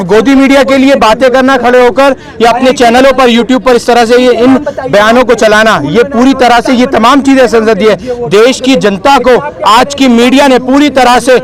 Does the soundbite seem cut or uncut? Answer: uncut